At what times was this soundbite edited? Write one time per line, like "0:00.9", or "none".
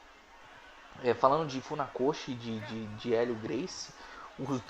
0:03.2